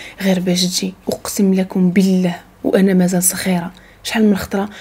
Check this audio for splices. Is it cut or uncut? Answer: cut